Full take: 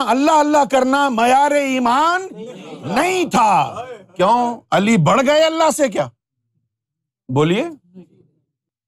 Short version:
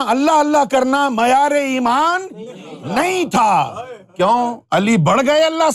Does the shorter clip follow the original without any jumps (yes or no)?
yes